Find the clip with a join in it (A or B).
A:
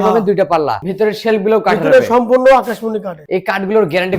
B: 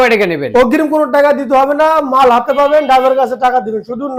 A